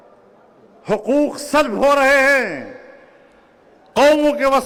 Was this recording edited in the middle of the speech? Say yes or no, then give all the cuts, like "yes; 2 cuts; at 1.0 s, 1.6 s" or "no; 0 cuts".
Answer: no; 0 cuts